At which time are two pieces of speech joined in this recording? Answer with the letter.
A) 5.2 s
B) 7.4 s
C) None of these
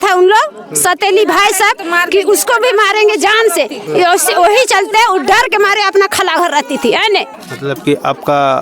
B